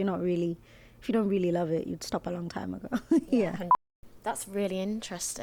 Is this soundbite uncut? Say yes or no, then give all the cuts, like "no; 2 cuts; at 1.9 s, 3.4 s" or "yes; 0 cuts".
no; 1 cut; at 3.7 s